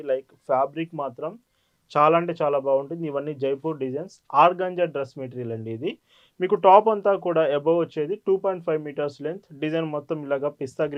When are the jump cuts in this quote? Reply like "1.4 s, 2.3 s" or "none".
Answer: none

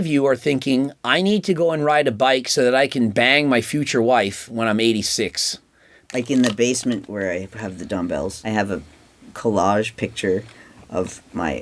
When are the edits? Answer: 6.1 s, 7.1 s, 8.4 s

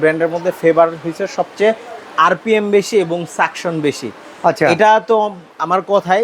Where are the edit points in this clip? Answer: none

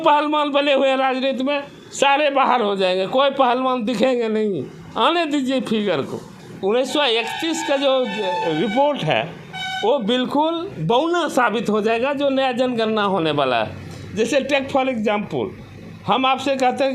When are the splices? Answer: 6.5 s

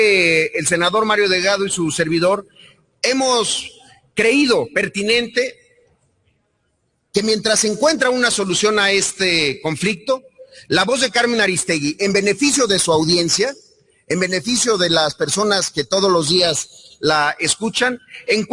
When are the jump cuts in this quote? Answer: 6.8 s

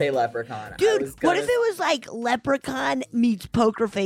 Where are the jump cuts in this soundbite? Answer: 3.1 s

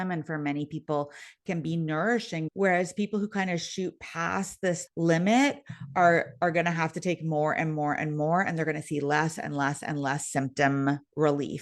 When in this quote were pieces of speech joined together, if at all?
2.5 s, 4.8 s

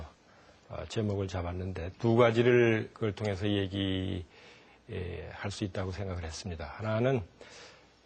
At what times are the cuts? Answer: 1.2 s

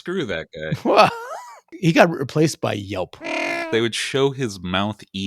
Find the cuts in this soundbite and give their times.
1.7 s, 3.5 s

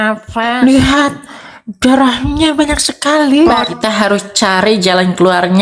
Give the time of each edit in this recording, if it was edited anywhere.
3.7 s

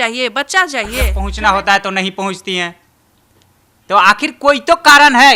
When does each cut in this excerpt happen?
1.2 s

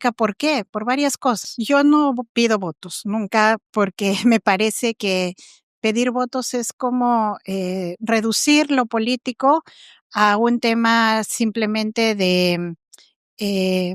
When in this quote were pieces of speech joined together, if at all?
1.4 s

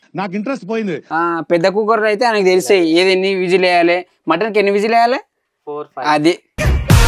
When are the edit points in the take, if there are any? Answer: 1.0 s

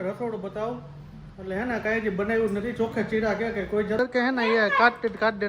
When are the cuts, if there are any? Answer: 4.0 s

